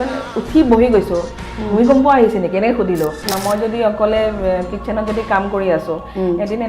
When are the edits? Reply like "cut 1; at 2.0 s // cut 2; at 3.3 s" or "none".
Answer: cut 1; at 3.3 s